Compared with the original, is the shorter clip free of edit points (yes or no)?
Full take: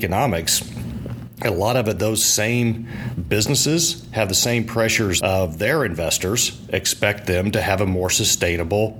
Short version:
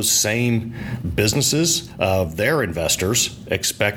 no